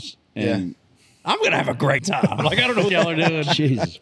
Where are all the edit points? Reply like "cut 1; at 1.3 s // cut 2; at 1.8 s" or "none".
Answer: cut 1; at 2.0 s

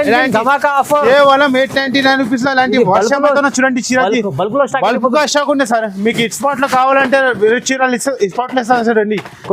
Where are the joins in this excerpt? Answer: none

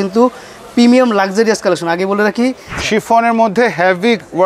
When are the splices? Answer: cut 1; at 2.7 s

